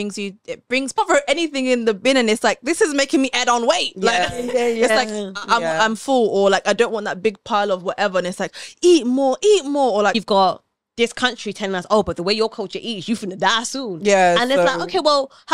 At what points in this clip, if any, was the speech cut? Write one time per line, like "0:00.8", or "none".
0:01.0
0:10.2